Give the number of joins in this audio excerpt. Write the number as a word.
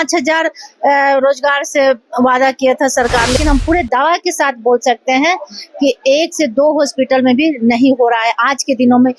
one